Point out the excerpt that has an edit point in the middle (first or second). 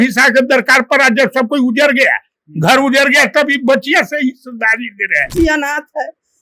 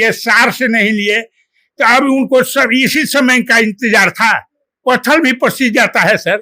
first